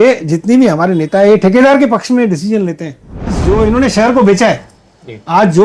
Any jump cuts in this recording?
yes; 1 cut; at 3.3 s

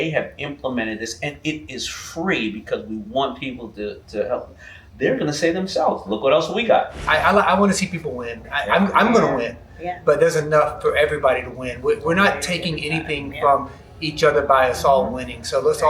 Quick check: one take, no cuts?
no; 1 cut; at 7.0 s

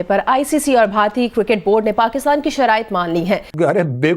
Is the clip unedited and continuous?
yes; 0 cuts

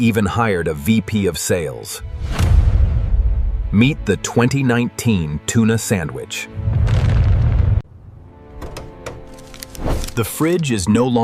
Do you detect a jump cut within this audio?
yes; 2 cuts; at 2.2 s, 6.7 s

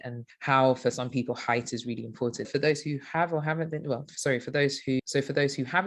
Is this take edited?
no; 0 cuts

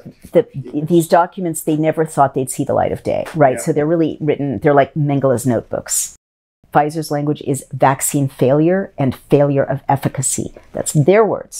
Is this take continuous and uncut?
no; 1 cut; at 6.2 s

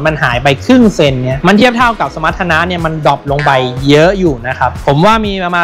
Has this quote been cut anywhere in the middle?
no; 0 cuts

